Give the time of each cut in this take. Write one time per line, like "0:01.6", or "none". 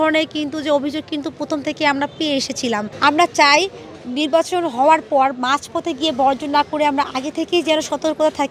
0:02.9